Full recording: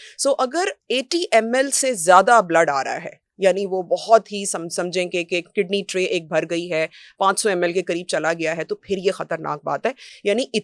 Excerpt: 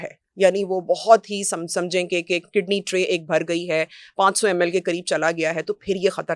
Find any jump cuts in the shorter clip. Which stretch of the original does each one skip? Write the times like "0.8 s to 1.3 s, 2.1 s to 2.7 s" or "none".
none

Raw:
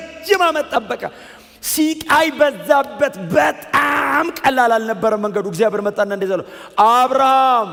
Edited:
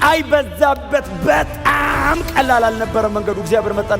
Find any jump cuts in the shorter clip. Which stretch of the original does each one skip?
none

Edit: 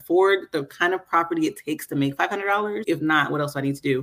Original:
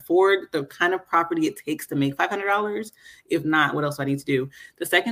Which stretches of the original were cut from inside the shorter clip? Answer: 2.8 s to 3.2 s

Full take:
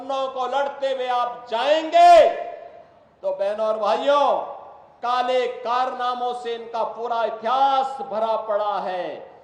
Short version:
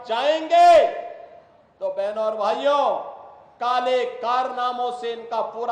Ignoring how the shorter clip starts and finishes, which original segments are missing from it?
none

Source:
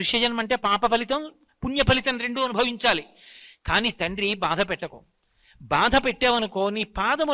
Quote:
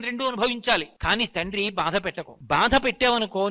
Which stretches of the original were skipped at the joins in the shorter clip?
3.1 s to 3.6 s, 4.9 s to 5.5 s

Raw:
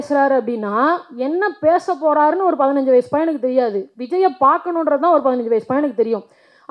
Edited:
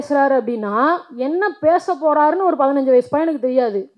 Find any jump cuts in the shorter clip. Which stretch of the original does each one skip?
none

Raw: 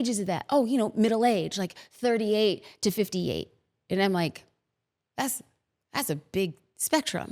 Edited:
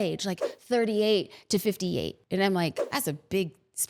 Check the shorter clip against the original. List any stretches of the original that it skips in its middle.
3.5 s to 3.8 s, 4.4 s to 5.8 s

